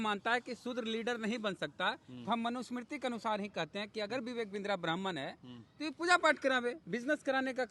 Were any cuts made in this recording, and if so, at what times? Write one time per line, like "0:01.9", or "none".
none